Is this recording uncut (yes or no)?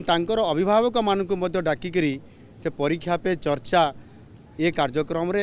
yes